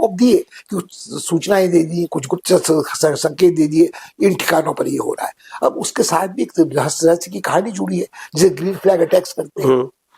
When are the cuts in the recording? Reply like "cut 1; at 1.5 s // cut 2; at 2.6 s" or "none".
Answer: none